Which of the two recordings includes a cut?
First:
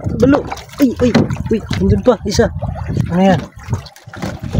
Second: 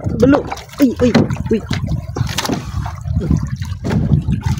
first; 2 cuts; at 1.8 s, 3.1 s

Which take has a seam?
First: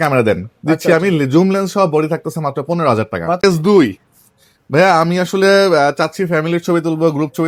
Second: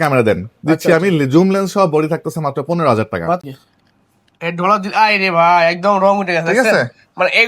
second; 1 cut; at 3.4 s

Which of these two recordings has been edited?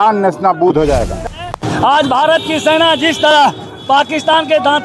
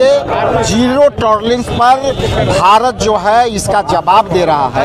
first; 1 cut; at 1.2 s

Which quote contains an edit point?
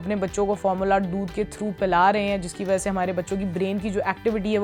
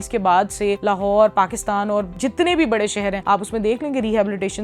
second; 3 cuts; at 0.8 s, 2.1 s, 3.2 s

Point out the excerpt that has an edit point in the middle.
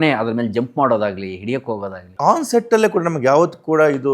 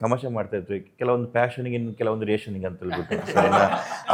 first; 1 cut; at 2.1 s

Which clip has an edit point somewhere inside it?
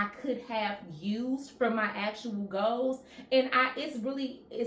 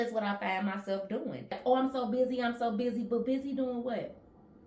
second; 1 cut; at 1.6 s

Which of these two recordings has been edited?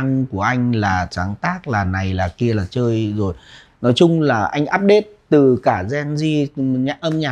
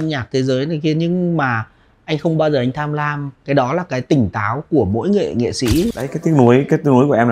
second; 1 cut; at 6.0 s

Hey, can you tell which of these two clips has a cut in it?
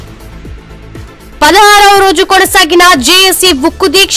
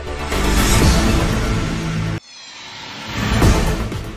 first; 1 cut; at 1.3 s

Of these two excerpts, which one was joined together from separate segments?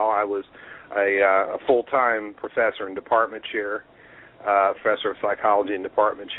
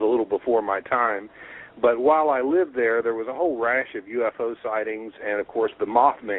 second; 1 cut; at 3.5 s

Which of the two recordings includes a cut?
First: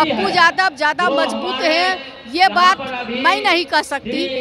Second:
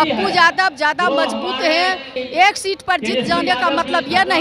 second; 1 cut; at 2.2 s

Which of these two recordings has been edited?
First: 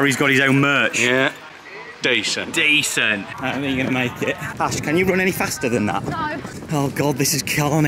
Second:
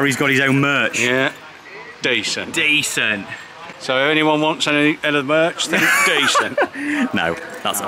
first; 3 cuts; at 3.3 s, 4.5 s, 6.5 s

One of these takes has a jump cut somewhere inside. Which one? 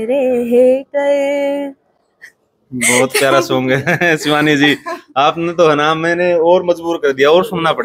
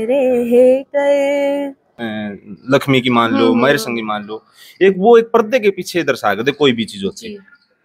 second; 1 cut; at 1.9 s

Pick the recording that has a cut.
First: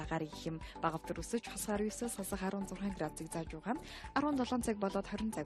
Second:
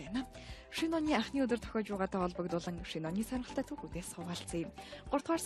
first; 1 cut; at 0.9 s

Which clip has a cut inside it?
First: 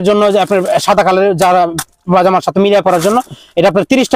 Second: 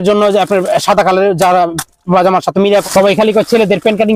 second; 1 cut; at 2.8 s

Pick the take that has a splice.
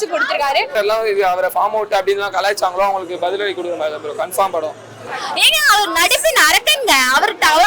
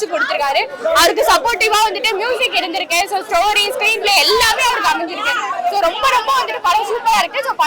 first; 2 cuts; at 0.8 s, 5.1 s

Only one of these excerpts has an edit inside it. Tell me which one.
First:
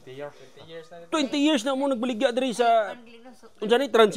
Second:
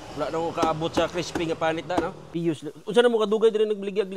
second; 1 cut; at 2.2 s

